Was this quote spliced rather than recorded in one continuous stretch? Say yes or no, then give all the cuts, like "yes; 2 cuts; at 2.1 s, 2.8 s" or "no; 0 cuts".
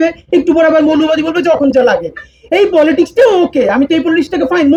no; 0 cuts